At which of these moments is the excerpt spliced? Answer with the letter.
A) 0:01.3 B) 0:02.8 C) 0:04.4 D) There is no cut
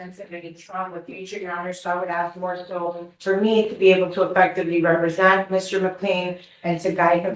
D